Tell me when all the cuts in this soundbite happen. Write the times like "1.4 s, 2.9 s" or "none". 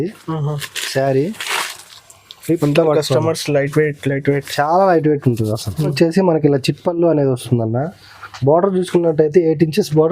5.9 s